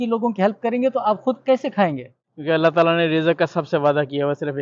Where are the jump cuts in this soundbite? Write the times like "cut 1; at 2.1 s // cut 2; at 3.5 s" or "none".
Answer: cut 1; at 2.1 s

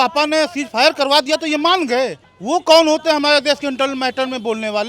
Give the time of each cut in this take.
cut 1; at 2.3 s

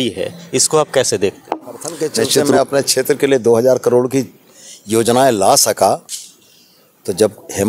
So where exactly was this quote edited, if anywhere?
cut 1; at 2.6 s

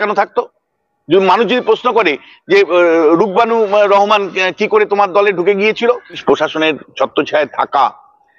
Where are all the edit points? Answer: cut 1; at 6.2 s

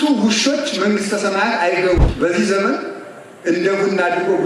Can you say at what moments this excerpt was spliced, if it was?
cut 1; at 2.0 s

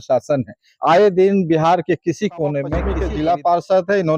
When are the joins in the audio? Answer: cut 1; at 2.9 s

